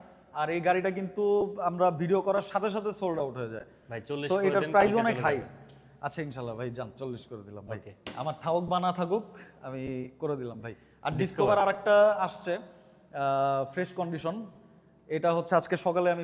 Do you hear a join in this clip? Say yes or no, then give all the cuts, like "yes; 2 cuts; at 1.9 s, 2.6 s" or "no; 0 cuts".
no; 0 cuts